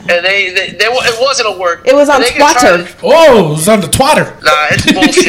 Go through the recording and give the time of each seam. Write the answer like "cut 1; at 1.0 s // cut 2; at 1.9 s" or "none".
cut 1; at 2.9 s // cut 2; at 4.4 s